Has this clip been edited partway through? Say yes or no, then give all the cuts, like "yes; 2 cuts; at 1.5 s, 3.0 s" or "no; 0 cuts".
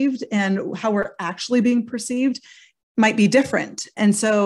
no; 0 cuts